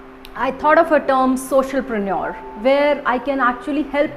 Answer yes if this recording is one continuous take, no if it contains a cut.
yes